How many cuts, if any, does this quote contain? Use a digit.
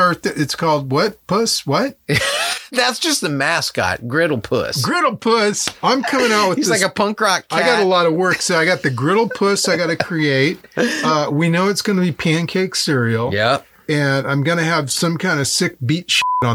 0